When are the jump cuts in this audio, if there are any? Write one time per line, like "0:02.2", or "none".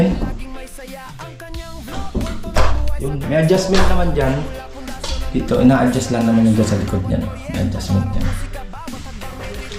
none

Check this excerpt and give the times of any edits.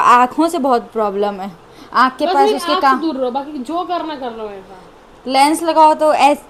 none

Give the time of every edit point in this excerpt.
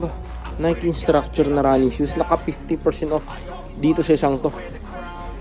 none

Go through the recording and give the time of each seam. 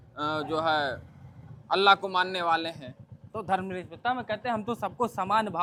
none

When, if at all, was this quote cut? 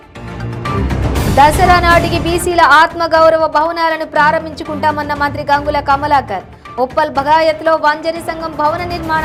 none

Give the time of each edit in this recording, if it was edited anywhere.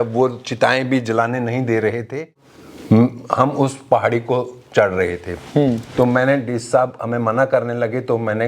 0:02.3

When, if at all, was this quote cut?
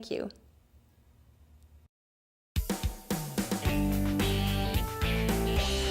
0:02.3

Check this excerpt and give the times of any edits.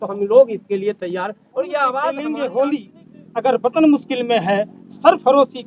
0:02.2

